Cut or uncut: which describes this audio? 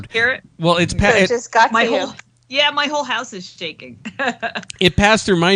cut